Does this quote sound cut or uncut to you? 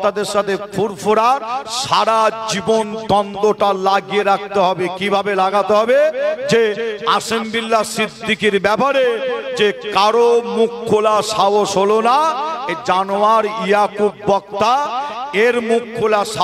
uncut